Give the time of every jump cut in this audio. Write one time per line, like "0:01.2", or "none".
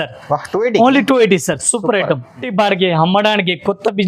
0:02.3